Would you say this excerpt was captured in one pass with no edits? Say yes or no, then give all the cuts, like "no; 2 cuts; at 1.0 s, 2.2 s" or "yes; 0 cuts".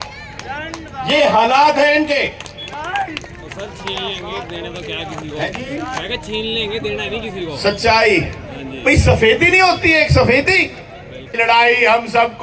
no; 1 cut; at 11.4 s